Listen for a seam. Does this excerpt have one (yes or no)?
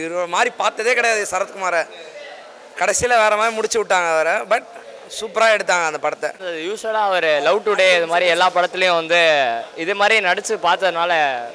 no